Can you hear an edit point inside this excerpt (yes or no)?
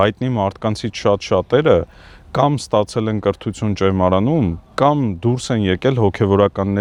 no